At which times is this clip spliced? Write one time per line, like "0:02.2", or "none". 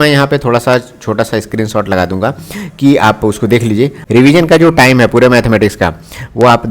0:04.0